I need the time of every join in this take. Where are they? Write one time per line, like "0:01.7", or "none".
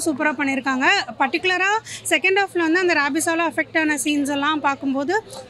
none